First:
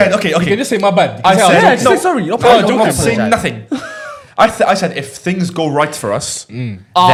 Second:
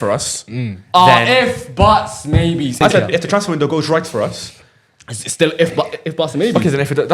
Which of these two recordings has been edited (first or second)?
second